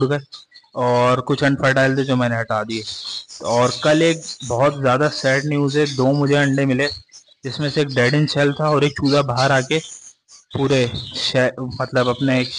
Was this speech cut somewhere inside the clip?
no; 0 cuts

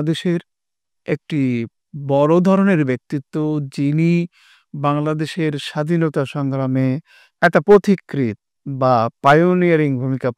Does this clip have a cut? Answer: no; 0 cuts

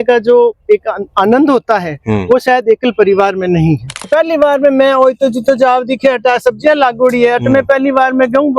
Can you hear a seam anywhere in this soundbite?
yes; 1 cut; at 4.1 s

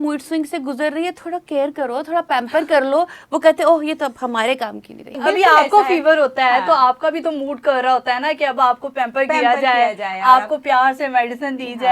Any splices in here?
yes; 1 cut; at 5.2 s

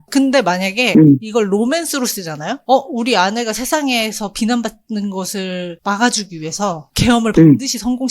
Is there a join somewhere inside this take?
yes; 1 cut; at 2.5 s

